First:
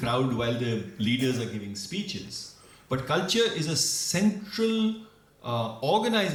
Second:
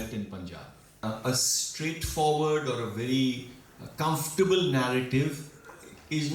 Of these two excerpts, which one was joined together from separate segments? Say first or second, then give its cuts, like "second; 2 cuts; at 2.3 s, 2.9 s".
second; 1 cut; at 1.0 s